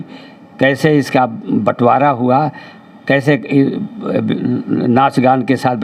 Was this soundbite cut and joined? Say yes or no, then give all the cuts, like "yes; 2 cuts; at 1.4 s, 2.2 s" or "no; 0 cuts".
no; 0 cuts